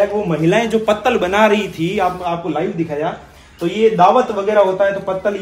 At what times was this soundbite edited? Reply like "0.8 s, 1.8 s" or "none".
none